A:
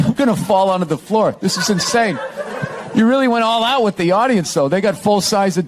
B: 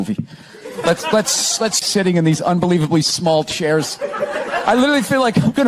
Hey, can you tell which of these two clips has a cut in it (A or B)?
B